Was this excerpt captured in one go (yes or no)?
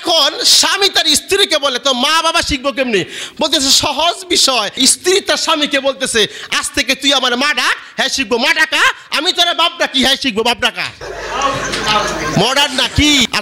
yes